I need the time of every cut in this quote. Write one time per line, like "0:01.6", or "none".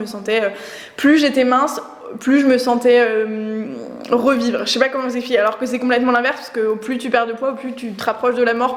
none